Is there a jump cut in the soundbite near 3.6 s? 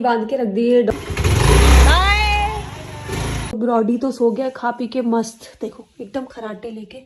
yes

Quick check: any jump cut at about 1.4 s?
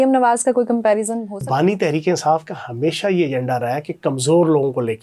yes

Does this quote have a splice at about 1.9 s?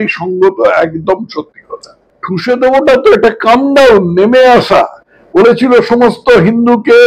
yes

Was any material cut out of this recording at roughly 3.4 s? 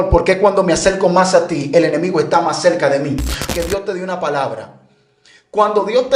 yes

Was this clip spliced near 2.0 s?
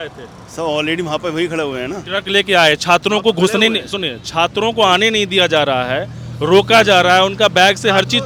no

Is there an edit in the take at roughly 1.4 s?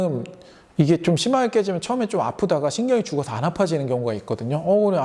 no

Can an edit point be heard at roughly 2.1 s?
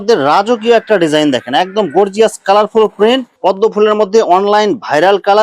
no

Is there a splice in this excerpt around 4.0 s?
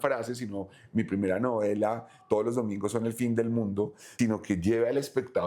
yes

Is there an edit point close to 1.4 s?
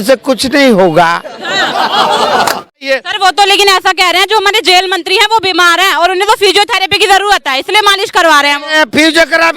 no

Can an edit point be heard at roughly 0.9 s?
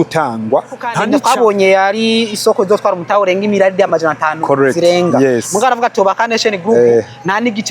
yes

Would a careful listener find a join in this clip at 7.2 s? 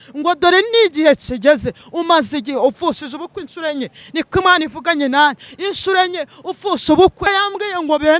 yes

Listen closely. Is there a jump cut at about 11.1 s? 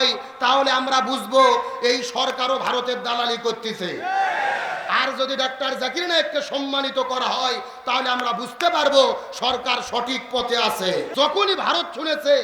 yes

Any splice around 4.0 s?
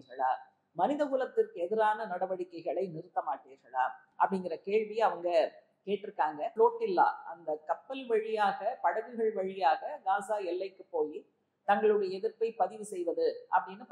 yes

